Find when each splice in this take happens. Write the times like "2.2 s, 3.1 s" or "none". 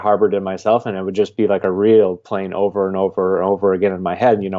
none